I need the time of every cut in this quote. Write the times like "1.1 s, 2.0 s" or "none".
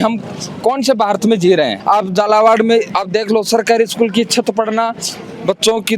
1.8 s